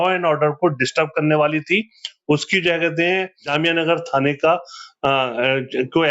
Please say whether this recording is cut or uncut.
cut